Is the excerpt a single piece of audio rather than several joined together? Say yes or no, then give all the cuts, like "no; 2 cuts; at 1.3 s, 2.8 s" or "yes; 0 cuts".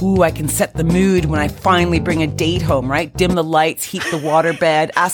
yes; 0 cuts